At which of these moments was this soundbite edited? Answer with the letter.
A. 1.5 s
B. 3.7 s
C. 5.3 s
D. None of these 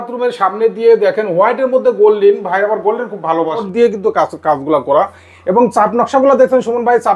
B